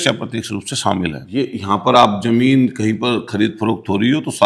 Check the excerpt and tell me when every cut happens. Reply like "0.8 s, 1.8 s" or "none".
1.2 s